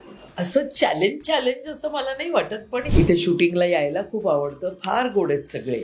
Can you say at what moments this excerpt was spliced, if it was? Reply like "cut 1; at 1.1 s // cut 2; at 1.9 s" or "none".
cut 1; at 2.9 s